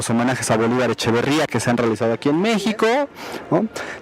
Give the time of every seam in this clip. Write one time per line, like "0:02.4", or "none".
0:01.8